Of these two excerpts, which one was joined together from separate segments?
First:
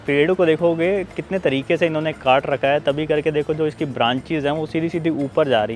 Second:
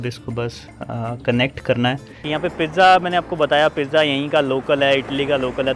second; 1 cut; at 2.1 s

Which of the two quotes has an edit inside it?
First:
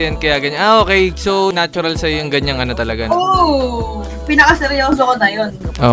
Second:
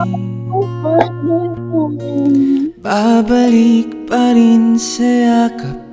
second; 1 cut; at 2.7 s

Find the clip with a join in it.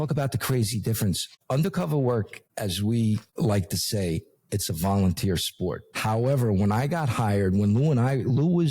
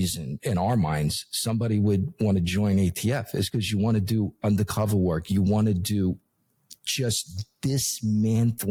first; 4 cuts; at 1.3 s, 2.4 s, 3.3 s, 5.9 s

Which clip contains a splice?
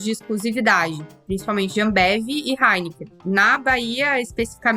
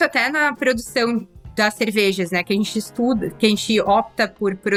first; 2 cuts; at 1.1 s, 3.2 s

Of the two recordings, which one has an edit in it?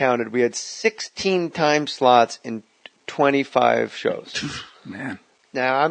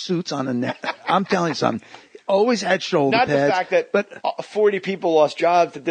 first; 1 cut; at 2.8 s

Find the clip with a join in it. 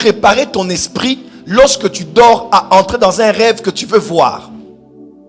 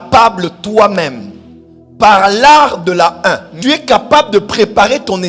second; 1 cut; at 3.5 s

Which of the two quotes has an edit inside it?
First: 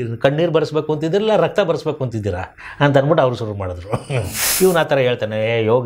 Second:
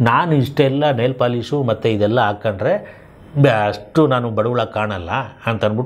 first; 1 cut; at 4.4 s

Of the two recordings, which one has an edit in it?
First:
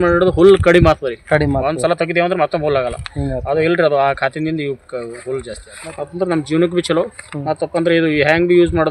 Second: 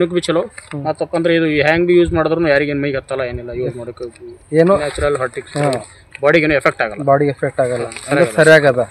first; 1 cut; at 5.6 s

